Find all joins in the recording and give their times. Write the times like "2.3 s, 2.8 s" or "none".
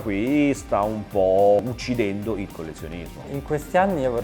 1.6 s, 3.3 s